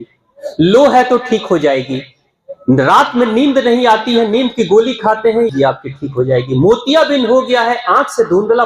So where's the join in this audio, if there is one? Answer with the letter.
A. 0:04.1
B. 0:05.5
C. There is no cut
B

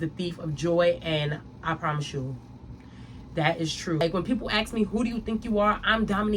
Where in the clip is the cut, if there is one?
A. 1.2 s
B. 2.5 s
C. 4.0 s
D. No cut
C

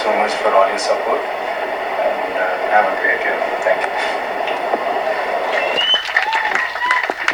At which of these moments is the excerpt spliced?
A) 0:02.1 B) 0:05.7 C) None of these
C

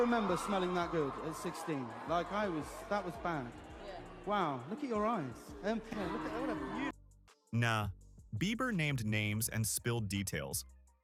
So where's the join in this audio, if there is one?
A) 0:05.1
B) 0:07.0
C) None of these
C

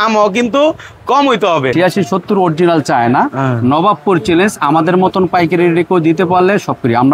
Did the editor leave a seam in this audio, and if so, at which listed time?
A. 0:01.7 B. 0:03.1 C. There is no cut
A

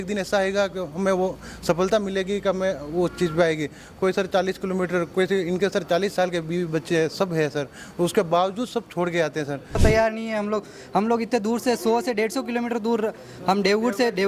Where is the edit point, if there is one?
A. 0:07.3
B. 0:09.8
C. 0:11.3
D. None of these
B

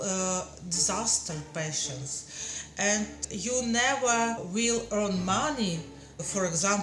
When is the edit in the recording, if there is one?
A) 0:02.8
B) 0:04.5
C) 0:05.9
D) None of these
D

